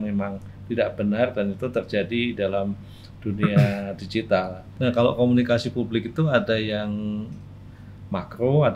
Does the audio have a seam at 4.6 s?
yes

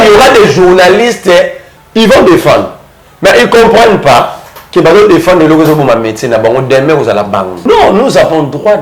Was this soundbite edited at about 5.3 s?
no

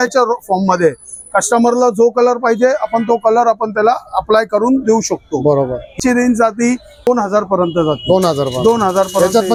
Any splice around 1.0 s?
no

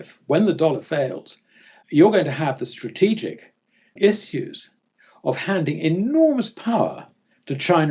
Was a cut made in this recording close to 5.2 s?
no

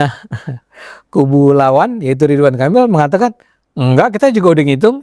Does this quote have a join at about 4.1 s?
yes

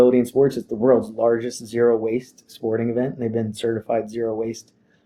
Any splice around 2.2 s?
no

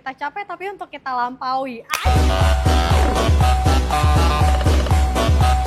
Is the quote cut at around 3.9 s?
no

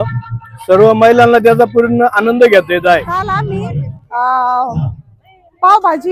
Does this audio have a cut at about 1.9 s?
no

